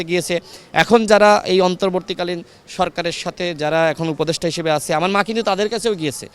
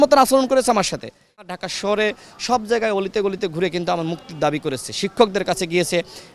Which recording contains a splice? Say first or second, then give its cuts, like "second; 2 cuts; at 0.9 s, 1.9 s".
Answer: second; 1 cut; at 1.4 s